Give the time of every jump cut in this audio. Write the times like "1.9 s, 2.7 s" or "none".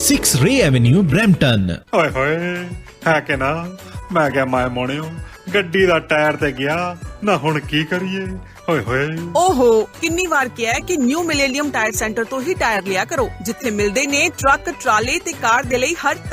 none

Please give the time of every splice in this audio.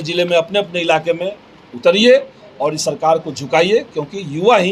none

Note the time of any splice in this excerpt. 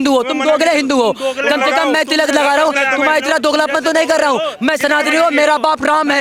none

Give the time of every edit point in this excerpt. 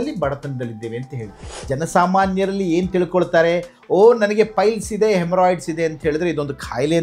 1.5 s

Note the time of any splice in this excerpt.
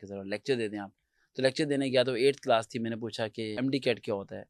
3.5 s

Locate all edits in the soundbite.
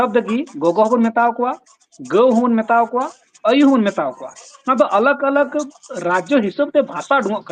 none

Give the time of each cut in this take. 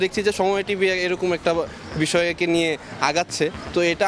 none

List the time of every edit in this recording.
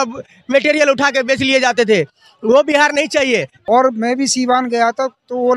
3.5 s

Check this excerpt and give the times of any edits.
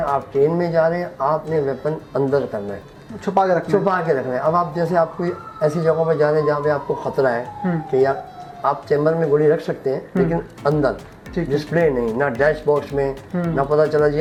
none

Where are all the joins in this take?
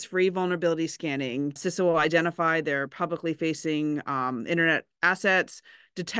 1.6 s

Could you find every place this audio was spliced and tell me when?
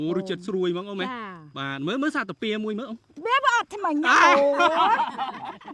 none

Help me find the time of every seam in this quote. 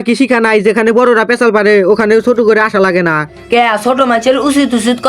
none

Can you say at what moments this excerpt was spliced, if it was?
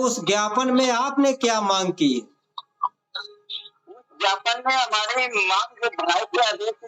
none

